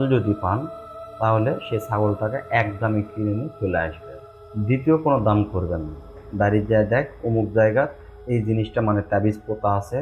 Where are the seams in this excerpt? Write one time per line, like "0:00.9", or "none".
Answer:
0:06.2